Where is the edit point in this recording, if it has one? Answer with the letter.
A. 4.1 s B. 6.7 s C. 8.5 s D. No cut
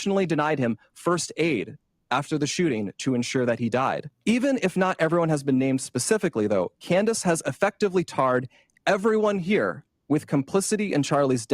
A